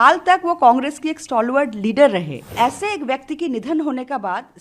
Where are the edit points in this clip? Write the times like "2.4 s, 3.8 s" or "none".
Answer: 2.4 s

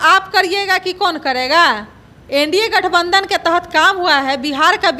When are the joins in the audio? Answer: none

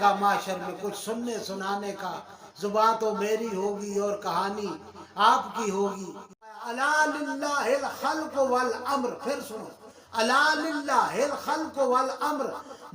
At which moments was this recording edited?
6.6 s

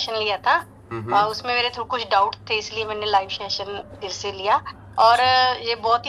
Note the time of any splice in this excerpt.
none

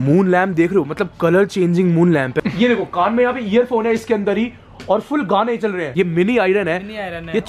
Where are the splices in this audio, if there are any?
2.4 s, 5.9 s

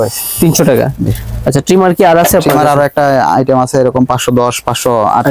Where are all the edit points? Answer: none

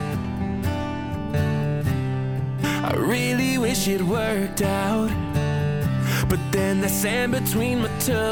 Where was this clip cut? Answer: none

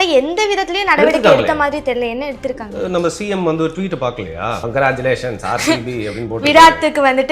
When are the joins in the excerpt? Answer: 4.6 s

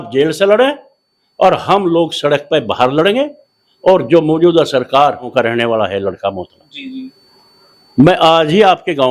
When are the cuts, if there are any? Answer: 5.3 s

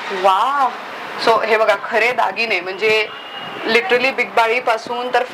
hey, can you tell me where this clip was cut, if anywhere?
none

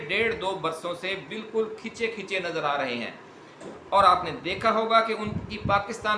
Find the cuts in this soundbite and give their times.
none

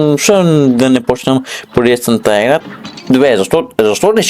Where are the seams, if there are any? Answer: 2.6 s

